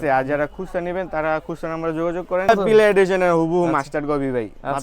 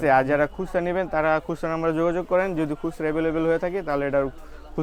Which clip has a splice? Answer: first; 1 cut; at 2.5 s

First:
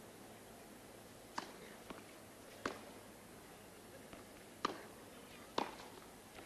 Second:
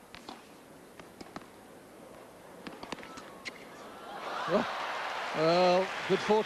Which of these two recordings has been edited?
first; 1 cut; at 5.4 s

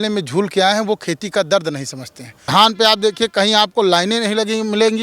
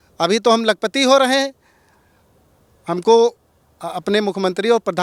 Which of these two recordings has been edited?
first; 1 cut; at 2.3 s

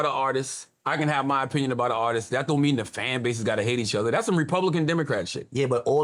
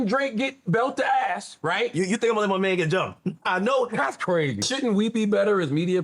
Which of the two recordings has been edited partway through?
second; 1 cut; at 4.7 s

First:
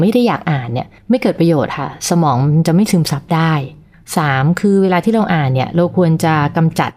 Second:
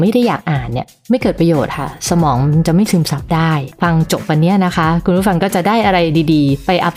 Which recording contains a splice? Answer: second; 1 cut; at 3.7 s

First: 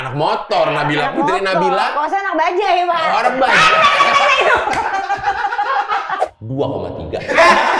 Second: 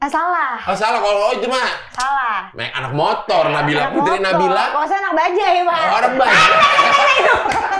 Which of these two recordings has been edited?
first; 1 cut; at 6.3 s

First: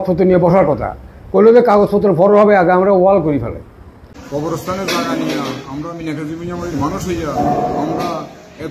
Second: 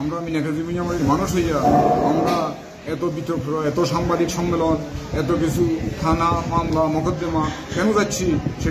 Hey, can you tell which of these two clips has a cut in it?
first; 1 cut; at 3.9 s

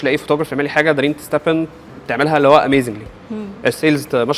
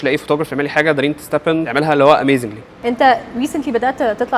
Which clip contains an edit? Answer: second; 2 cuts; at 1.7 s, 2.8 s

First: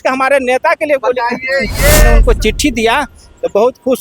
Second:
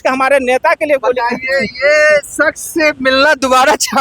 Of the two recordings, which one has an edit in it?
first; 1 cut; at 2.1 s

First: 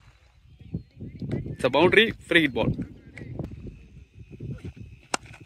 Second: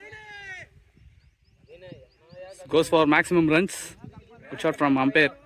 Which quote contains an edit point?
first; 1 cut; at 3.5 s

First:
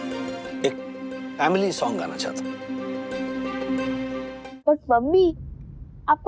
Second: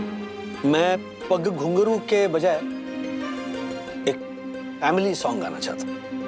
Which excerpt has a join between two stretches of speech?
first; 1 cut; at 4.3 s

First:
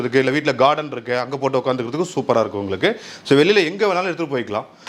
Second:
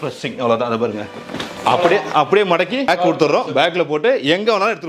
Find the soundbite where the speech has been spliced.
second; 1 cut; at 2.9 s

